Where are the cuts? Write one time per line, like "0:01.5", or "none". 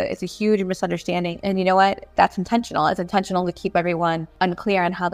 0:01.4
0:02.1
0:04.3